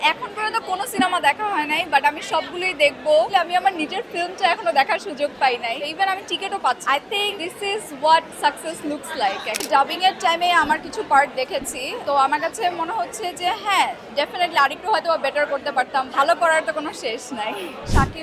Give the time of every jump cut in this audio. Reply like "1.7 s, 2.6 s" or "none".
3.3 s, 5.9 s, 6.9 s, 8.3 s, 9.6 s, 12.0 s, 16.1 s